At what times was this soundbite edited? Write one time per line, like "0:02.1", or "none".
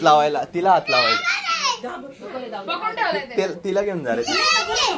none